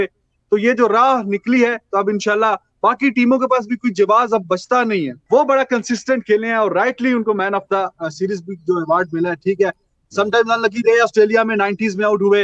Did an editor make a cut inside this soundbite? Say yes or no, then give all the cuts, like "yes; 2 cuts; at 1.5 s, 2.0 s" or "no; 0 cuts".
yes; 1 cut; at 5.2 s